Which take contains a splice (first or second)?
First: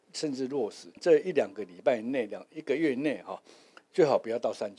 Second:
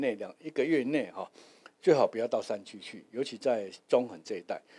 first